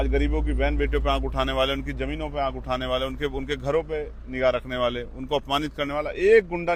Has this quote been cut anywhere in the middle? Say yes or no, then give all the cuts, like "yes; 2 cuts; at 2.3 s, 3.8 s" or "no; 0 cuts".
no; 0 cuts